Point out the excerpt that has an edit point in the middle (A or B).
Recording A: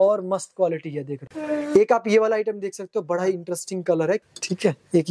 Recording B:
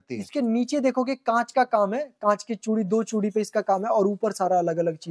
A